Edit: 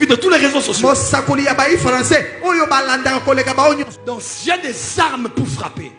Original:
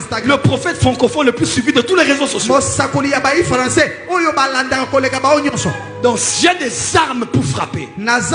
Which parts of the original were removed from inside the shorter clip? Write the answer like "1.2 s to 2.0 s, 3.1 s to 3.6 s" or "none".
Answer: 5.5 s to 5.8 s